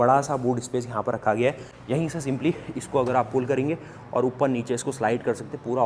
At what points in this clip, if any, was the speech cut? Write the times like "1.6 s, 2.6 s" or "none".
1.7 s